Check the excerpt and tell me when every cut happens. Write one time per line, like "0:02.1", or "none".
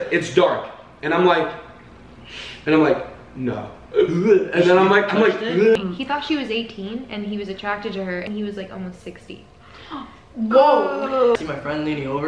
0:05.8
0:08.2
0:11.4